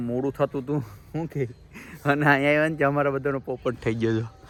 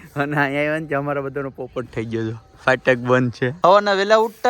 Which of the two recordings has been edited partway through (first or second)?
second